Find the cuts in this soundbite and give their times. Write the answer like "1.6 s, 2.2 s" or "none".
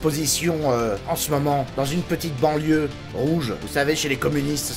none

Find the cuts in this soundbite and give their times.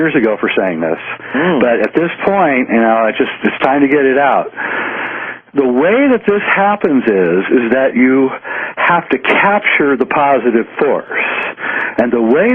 4.8 s

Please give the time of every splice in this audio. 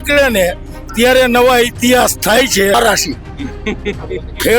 2.7 s

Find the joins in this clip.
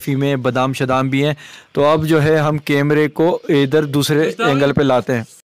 none

